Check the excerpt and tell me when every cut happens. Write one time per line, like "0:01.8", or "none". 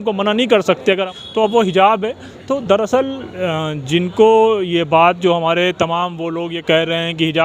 0:01.1